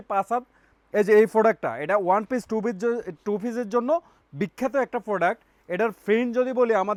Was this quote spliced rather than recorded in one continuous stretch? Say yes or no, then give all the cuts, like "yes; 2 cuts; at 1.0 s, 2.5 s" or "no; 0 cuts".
no; 0 cuts